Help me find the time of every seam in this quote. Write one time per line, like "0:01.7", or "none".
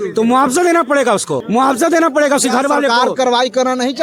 none